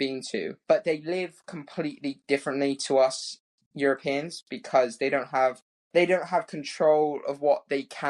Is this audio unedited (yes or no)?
yes